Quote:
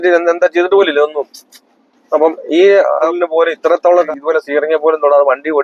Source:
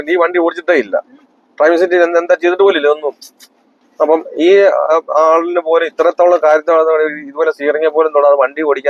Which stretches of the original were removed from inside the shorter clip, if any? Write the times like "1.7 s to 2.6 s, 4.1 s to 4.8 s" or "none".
5.0 s to 5.5 s, 6.4 s to 7.2 s